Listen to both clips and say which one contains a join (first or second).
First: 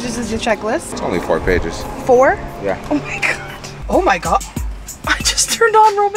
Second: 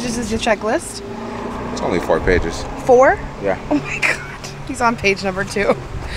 first